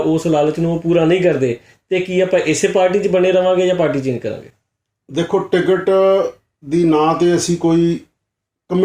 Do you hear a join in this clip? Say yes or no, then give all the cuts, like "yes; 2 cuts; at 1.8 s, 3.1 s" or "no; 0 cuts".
no; 0 cuts